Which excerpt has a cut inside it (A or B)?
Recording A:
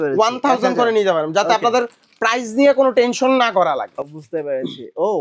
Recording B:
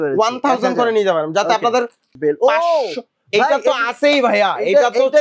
B